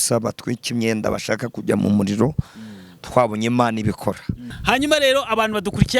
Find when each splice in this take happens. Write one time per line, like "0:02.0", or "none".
0:04.5